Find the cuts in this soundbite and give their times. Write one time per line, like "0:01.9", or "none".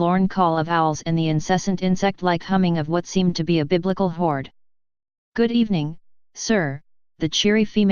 0:04.2